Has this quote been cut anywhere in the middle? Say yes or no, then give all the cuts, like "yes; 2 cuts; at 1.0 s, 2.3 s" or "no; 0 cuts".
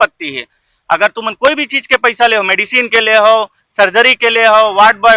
no; 0 cuts